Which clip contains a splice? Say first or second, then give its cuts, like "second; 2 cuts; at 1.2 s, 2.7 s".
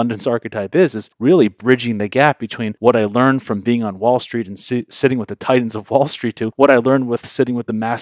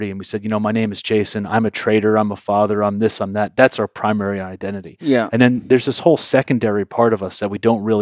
first; 3 cuts; at 1.1 s, 2.7 s, 6.5 s